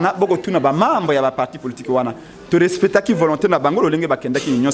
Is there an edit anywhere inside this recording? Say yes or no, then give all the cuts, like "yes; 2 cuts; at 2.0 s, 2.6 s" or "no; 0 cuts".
no; 0 cuts